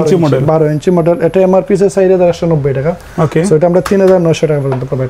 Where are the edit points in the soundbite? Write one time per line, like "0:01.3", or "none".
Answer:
none